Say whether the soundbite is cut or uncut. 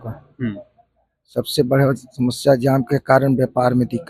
uncut